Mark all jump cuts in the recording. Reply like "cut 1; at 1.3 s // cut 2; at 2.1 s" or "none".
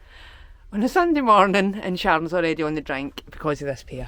none